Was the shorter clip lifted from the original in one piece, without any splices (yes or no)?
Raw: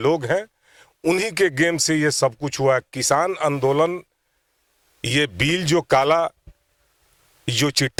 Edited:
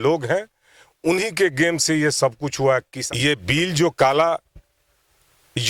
no